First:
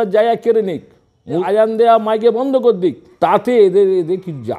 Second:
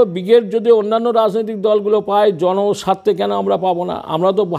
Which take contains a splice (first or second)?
first